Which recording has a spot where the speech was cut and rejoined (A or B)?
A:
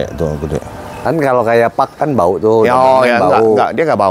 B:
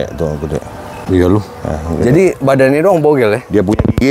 A